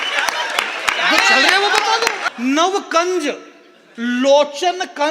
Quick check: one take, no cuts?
no; 1 cut; at 2.2 s

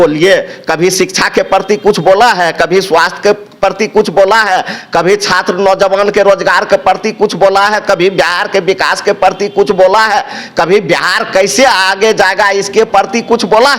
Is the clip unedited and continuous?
yes; 0 cuts

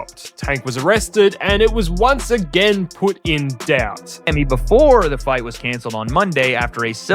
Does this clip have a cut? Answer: yes; 1 cut; at 4.3 s

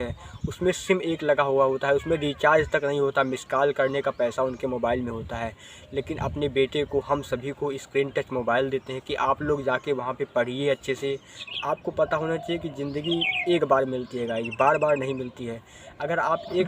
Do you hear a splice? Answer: yes; 1 cut; at 11.4 s

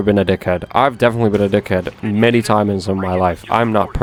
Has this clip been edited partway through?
no; 0 cuts

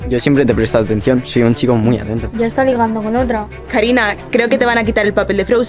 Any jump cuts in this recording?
yes; 2 cuts; at 2.3 s, 3.5 s

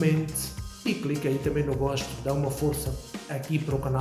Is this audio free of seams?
yes; 0 cuts

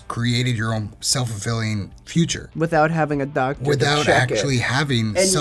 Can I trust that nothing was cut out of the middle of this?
no; 1 cut; at 2.0 s

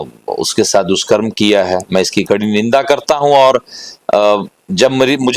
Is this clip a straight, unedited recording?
yes; 0 cuts

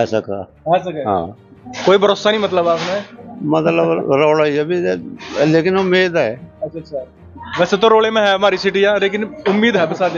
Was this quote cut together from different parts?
no; 0 cuts

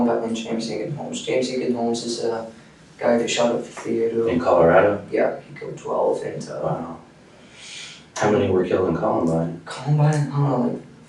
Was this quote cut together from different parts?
no; 0 cuts

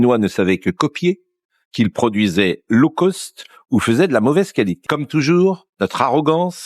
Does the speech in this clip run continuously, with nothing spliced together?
no; 1 cut; at 4.8 s

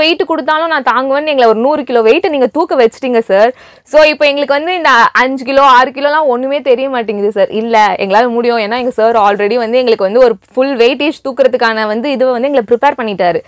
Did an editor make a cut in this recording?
no; 0 cuts

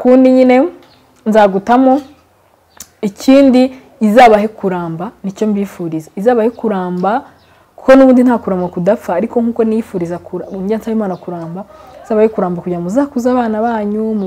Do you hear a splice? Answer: no; 0 cuts

